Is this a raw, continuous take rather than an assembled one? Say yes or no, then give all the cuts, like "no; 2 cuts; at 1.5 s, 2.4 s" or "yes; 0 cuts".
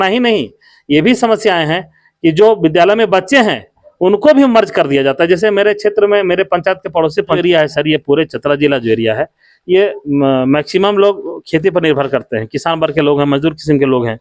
no; 1 cut; at 7.4 s